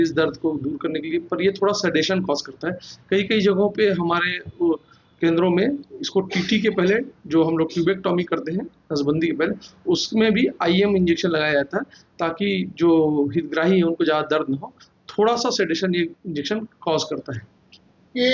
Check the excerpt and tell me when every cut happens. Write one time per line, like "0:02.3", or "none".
none